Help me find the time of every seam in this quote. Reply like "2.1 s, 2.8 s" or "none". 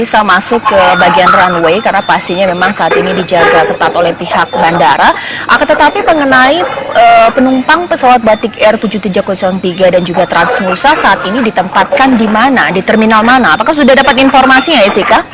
none